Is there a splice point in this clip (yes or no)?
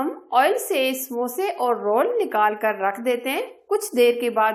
no